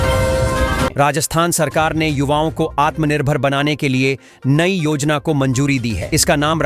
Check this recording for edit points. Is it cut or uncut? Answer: cut